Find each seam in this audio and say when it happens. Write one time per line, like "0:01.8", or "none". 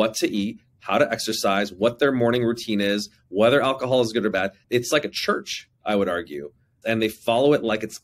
none